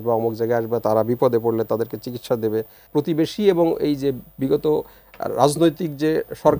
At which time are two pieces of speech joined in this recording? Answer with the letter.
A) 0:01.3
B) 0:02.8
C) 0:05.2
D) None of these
B